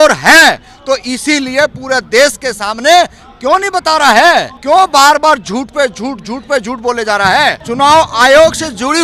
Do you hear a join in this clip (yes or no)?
yes